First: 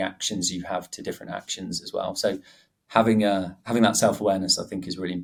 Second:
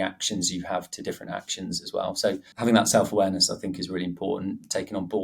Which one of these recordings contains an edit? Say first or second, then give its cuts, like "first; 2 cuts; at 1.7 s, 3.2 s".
second; 1 cut; at 2.5 s